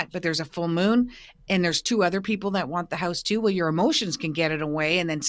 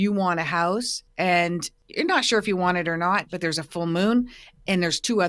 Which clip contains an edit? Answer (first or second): second